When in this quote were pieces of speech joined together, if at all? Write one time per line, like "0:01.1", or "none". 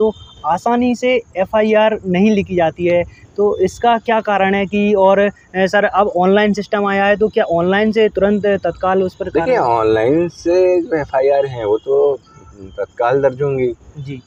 none